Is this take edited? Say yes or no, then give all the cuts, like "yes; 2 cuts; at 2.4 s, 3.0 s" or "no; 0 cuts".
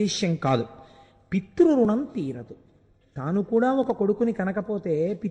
no; 0 cuts